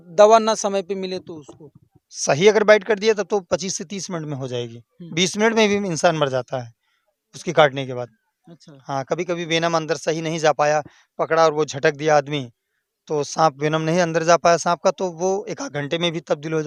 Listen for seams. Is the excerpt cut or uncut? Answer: uncut